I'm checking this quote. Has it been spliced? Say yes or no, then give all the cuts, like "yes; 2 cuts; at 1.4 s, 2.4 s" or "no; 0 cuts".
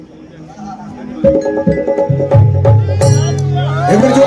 no; 0 cuts